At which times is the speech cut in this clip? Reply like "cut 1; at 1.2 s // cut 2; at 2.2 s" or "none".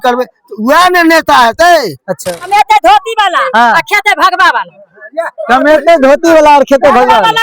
cut 1; at 2.5 s